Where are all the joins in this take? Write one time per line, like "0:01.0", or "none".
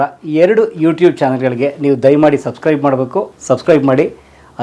0:03.3